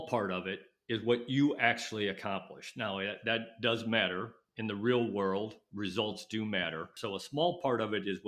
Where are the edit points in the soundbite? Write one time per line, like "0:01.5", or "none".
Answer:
0:06.9